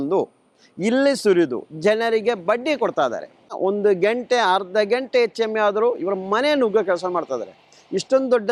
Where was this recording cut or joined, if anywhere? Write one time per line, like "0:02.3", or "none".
none